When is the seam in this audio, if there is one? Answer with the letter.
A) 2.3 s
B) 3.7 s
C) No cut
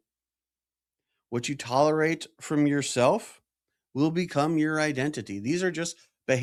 C